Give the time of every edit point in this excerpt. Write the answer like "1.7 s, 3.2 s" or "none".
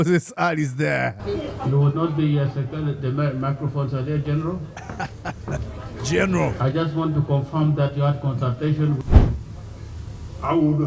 9.0 s